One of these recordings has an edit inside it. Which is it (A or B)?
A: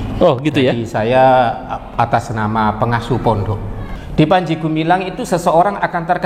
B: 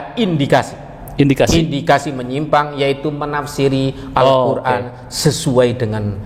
A